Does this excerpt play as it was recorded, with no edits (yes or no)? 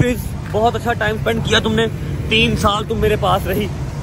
yes